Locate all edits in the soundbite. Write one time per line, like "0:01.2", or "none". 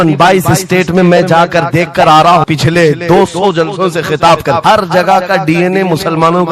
0:02.5
0:04.6